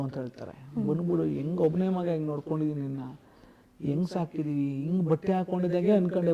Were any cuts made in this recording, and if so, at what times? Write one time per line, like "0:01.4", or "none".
none